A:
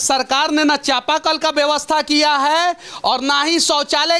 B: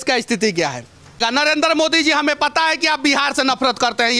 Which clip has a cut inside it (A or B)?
B